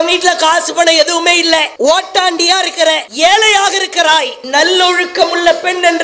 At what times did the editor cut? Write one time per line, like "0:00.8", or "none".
0:01.7
0:03.1
0:04.4

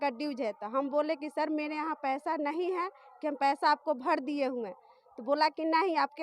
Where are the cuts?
none

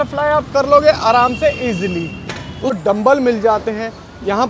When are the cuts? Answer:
0:02.8

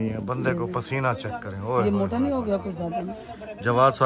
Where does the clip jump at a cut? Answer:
none

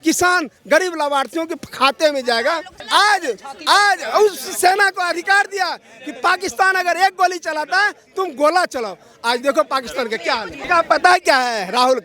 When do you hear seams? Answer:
0:02.7
0:10.6

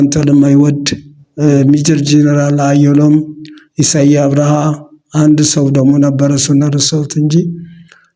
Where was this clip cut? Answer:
none

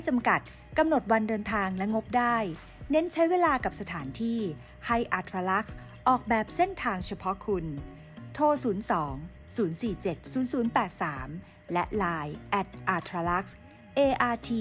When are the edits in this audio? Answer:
none

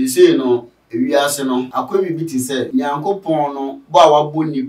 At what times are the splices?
0:01.7
0:02.7

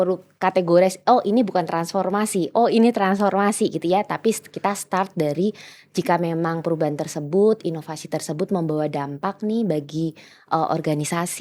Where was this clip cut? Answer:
none

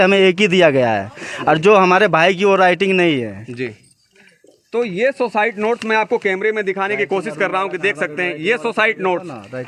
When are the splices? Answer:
none

